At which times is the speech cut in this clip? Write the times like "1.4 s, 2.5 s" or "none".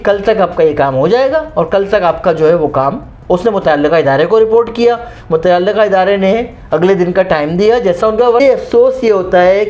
8.4 s